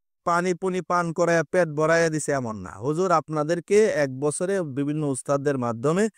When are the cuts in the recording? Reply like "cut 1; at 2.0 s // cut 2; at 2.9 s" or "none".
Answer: none